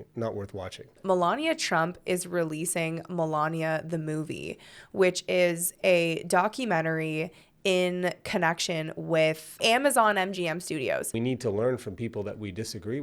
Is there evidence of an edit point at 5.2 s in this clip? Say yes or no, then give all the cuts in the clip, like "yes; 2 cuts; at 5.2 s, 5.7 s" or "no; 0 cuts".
no; 2 cuts; at 0.9 s, 11.1 s